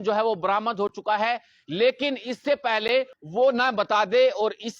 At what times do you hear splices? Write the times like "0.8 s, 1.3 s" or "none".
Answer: 3.2 s

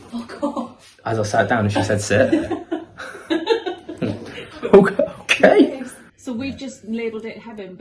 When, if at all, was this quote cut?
6.1 s

